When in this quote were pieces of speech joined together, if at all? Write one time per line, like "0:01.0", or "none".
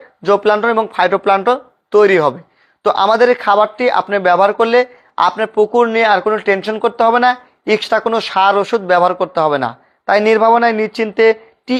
none